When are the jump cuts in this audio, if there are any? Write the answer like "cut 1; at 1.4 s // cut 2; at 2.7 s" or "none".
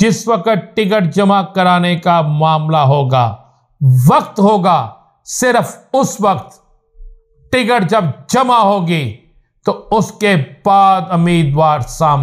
none